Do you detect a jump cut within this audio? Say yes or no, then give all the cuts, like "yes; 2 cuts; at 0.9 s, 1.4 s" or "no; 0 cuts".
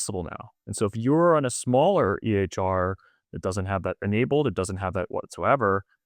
no; 0 cuts